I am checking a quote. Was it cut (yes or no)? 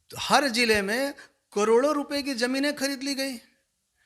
no